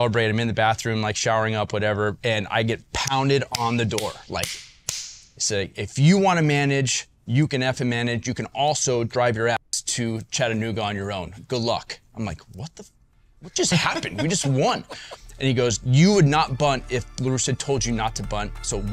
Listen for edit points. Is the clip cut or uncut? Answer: cut